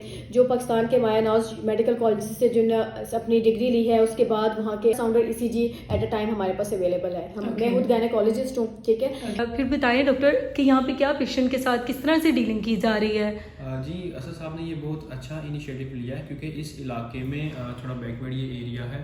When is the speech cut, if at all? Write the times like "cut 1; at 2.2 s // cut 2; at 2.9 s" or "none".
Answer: cut 1; at 5.0 s // cut 2; at 9.4 s